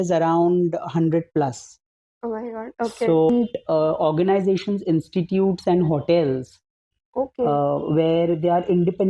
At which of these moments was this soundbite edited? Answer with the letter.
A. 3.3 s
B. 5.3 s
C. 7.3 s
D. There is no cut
A